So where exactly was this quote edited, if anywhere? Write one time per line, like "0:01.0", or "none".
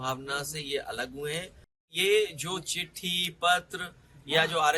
0:01.9